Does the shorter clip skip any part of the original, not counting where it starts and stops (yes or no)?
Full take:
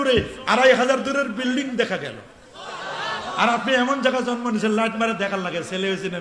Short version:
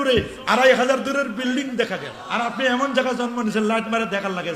yes